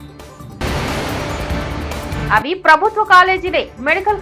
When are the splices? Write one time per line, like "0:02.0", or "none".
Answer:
0:02.2

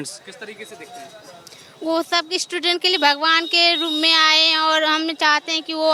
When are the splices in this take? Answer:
none

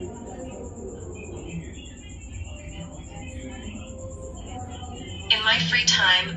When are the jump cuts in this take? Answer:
0:04.5

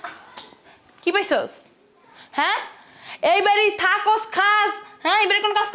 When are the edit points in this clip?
none

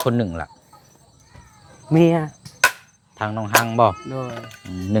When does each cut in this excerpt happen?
none

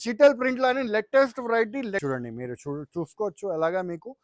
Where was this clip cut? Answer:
0:02.0

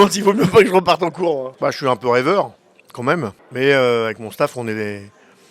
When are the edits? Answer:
0:01.5
0:03.4

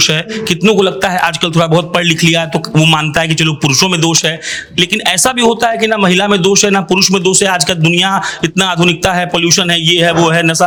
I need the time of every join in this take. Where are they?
none

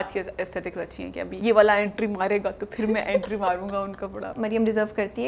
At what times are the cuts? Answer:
0:01.3
0:04.3

